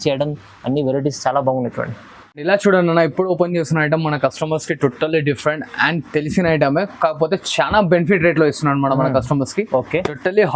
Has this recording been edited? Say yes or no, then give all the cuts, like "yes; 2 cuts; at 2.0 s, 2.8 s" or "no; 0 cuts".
no; 0 cuts